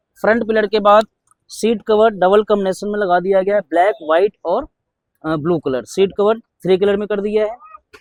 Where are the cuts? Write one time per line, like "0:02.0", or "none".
none